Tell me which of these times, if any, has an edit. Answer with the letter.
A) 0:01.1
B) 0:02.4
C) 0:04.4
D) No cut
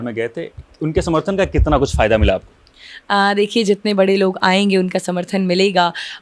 D